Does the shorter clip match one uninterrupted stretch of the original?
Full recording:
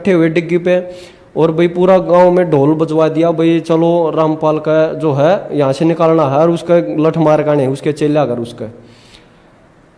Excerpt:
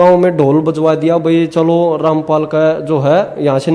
yes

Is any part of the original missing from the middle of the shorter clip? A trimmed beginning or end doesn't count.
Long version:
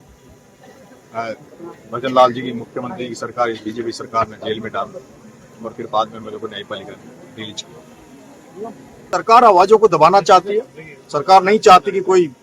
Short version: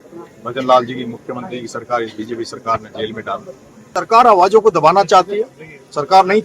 yes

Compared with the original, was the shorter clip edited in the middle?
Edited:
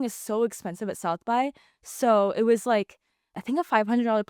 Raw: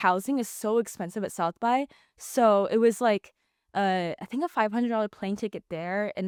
yes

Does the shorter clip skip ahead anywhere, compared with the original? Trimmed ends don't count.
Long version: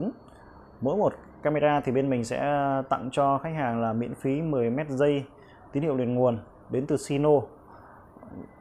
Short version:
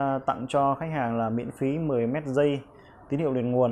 no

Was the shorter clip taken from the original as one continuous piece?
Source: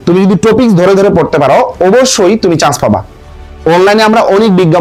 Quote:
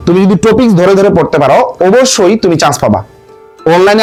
yes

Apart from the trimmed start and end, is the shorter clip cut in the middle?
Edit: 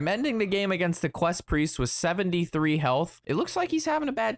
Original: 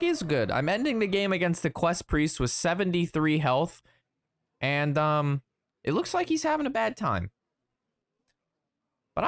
yes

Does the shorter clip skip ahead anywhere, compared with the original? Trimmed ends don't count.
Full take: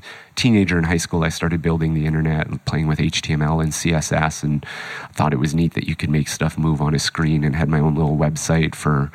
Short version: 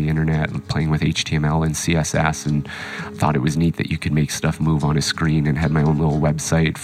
no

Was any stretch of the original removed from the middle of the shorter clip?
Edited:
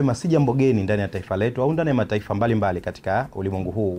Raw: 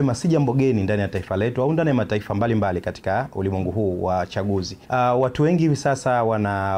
no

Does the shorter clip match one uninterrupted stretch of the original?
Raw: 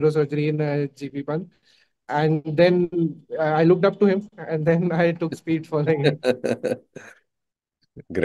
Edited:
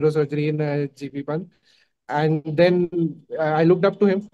yes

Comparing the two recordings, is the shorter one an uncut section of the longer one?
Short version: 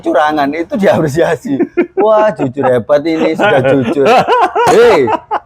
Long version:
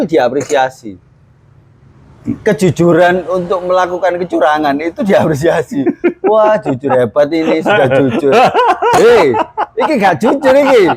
yes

